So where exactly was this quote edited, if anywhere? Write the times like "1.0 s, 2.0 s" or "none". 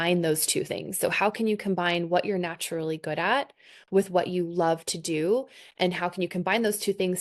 none